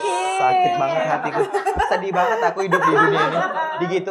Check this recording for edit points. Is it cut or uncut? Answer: uncut